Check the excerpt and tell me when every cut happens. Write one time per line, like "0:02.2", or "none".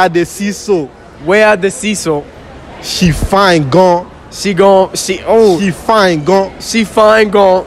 0:02.4